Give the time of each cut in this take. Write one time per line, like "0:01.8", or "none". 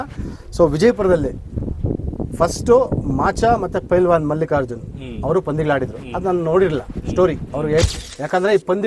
0:07.9

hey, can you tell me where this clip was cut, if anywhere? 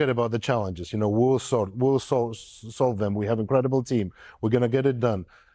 none

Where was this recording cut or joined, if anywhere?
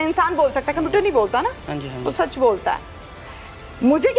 none

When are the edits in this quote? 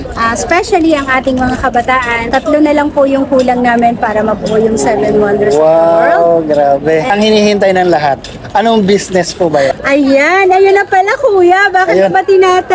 0:02.2
0:07.1
0:09.8

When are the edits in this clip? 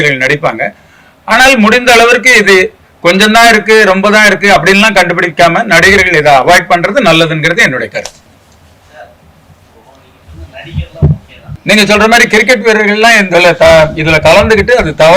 0:11.5

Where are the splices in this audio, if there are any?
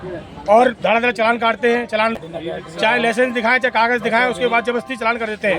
0:02.3

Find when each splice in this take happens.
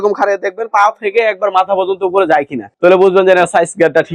none

